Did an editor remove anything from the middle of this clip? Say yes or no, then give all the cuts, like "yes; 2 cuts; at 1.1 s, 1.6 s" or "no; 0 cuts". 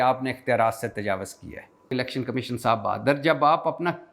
yes; 1 cut; at 1.9 s